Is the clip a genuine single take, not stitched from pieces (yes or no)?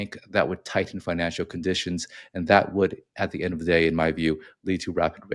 yes